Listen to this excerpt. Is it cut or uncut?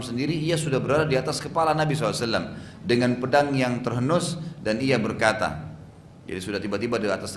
uncut